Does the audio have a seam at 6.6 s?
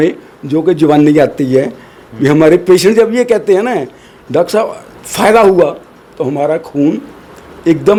no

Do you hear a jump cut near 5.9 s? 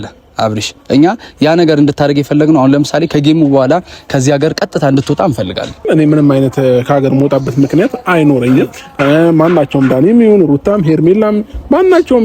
yes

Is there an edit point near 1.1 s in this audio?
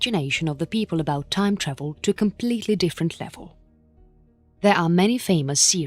yes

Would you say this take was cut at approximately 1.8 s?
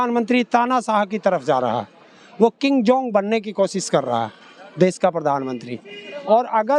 no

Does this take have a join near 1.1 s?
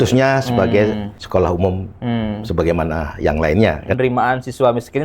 yes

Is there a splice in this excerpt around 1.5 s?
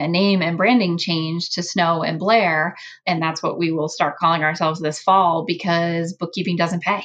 no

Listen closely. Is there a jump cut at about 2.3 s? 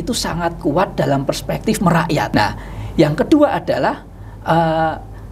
yes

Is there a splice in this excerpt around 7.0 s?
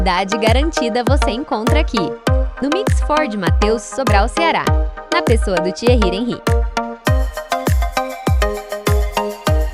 no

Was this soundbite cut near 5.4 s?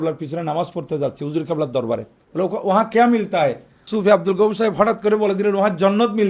no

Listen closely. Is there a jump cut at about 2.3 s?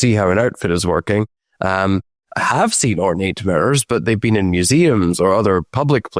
no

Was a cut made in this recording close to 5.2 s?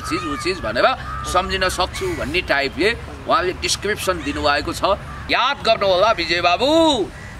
yes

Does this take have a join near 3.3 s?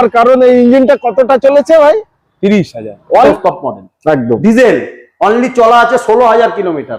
yes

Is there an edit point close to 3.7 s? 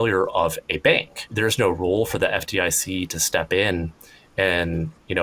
no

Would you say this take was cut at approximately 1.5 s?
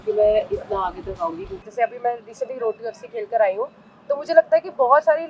yes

